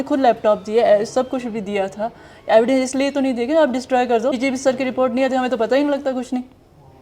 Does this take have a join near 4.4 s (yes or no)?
yes